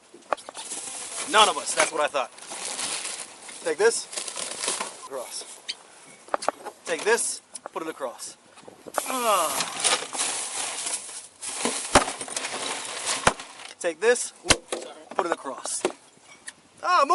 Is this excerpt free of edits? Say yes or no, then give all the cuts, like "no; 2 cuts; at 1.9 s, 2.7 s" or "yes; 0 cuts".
no; 1 cut; at 5.1 s